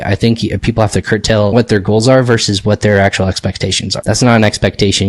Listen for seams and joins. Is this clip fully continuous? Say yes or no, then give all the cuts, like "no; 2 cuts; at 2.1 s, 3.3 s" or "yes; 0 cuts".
no; 2 cuts; at 1.5 s, 4.0 s